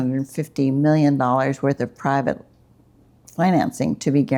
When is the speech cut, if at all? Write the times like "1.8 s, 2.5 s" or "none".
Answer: none